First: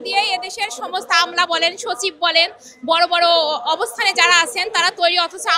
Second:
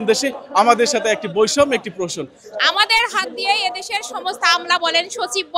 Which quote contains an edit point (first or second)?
second